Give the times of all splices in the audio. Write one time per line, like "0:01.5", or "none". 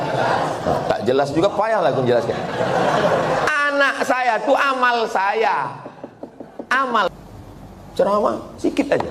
0:07.1